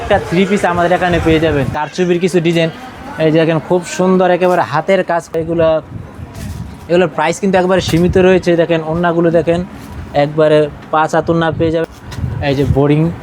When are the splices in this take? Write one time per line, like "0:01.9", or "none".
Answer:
0:01.8
0:05.3
0:11.8